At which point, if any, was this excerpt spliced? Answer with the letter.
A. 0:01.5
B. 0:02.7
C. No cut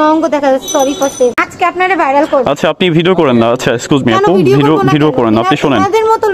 A